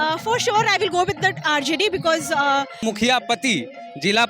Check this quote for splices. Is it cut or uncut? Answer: cut